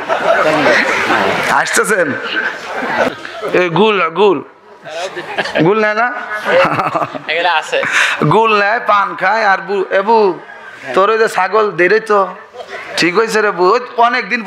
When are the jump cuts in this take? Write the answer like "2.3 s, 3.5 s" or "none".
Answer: 3.1 s